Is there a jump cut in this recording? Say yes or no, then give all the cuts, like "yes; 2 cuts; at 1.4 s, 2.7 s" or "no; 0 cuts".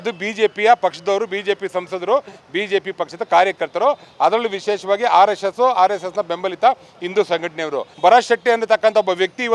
yes; 1 cut; at 7.9 s